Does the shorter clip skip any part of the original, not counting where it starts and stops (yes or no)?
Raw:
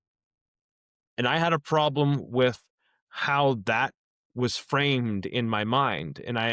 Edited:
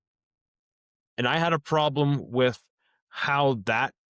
no